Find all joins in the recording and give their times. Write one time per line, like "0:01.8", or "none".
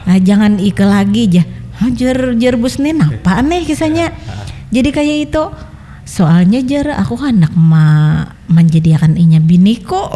none